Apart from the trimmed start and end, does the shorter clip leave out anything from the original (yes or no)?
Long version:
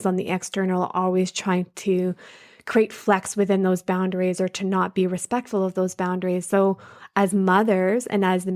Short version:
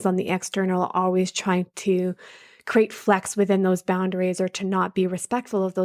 no